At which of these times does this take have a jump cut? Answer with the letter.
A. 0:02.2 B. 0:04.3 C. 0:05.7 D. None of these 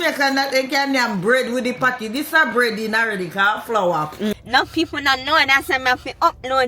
B